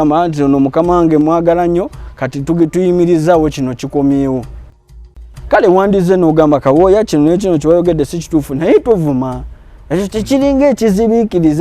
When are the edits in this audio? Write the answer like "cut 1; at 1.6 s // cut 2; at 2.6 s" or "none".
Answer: cut 1; at 4.9 s